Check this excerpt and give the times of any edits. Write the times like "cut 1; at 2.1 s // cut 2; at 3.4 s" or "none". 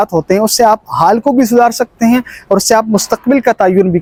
none